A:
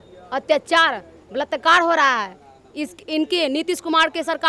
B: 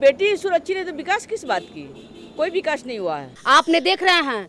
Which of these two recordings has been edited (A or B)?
B